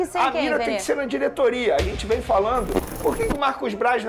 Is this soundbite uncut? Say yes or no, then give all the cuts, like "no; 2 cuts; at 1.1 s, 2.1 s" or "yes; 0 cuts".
no; 1 cut; at 2.8 s